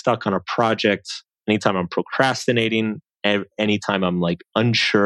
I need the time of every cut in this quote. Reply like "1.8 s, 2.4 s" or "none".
none